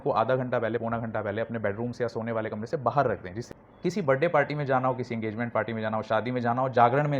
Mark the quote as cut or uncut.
cut